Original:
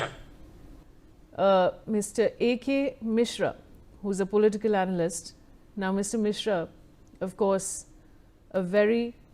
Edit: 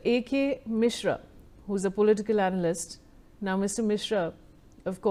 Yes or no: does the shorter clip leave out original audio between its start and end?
no